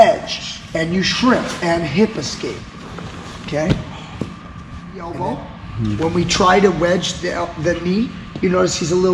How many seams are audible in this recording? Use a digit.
1